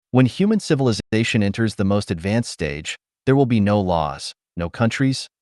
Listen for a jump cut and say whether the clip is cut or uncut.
uncut